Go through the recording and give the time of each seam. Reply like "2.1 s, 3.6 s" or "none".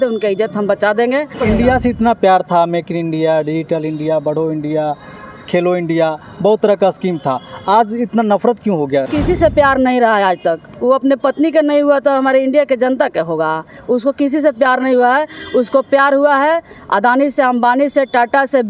1.3 s, 9.1 s